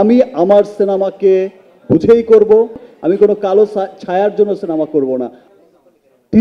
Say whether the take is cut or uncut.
cut